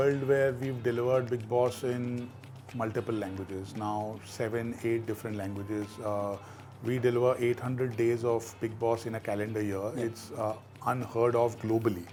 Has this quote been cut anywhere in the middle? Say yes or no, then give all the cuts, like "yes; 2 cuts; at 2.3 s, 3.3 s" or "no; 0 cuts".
no; 0 cuts